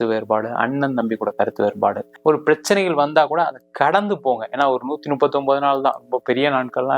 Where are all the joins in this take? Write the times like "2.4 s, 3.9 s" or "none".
2.1 s